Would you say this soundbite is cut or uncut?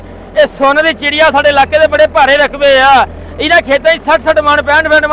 uncut